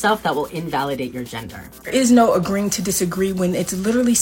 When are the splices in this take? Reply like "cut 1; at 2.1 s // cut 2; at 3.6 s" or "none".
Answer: cut 1; at 1.9 s